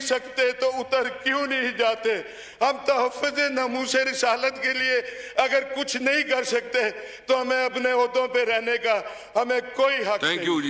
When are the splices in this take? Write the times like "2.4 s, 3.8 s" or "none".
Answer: none